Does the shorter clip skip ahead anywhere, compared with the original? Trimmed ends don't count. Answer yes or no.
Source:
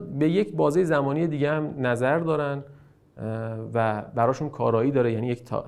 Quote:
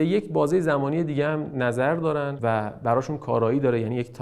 yes